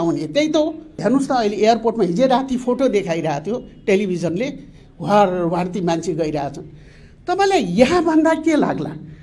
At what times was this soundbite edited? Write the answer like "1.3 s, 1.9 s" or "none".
0.9 s